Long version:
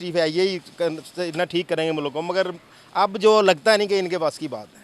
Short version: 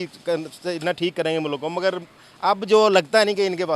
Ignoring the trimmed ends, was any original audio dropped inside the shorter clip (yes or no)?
no